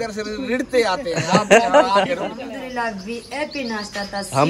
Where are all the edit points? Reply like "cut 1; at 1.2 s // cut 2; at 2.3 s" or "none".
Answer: cut 1; at 2.4 s

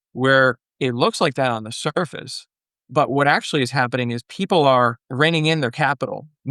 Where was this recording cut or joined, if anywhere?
cut 1; at 5.0 s

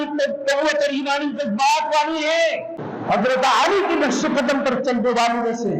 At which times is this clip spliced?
cut 1; at 2.7 s

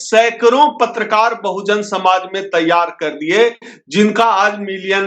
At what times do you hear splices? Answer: none

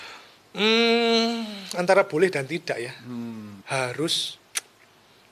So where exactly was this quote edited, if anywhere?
cut 1; at 3.5 s

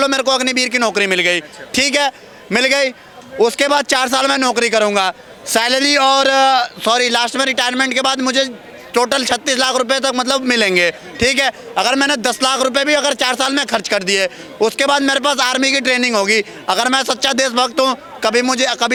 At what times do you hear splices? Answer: none

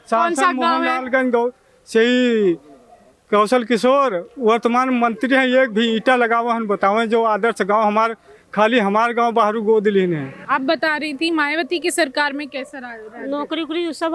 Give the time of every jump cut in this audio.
cut 1; at 10.5 s

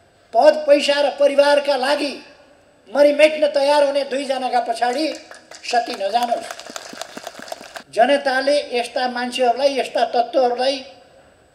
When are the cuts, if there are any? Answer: cut 1; at 7.9 s

